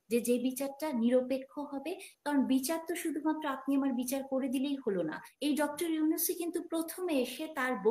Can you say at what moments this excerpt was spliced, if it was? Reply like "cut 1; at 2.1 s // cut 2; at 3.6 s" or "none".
cut 1; at 5.3 s